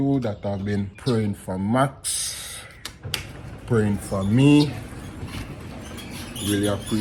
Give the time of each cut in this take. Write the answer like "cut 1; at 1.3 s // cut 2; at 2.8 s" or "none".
none